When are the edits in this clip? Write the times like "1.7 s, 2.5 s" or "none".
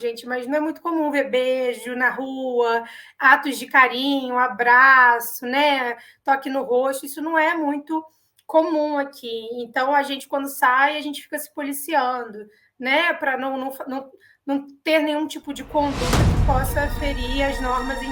none